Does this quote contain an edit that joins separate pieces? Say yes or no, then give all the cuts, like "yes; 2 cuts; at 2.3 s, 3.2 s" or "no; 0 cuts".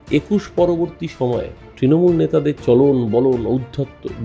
yes; 1 cut; at 1.6 s